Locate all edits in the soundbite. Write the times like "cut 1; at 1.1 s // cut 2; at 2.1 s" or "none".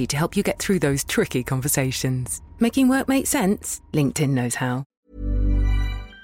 cut 1; at 5.0 s